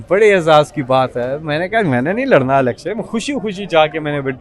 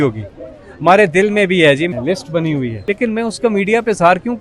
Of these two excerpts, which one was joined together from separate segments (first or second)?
second